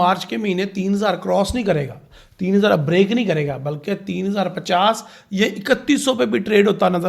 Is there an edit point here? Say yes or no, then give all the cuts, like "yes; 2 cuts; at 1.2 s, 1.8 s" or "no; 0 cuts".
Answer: no; 0 cuts